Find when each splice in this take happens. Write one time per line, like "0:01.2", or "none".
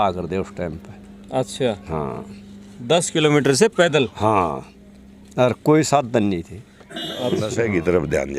0:07.5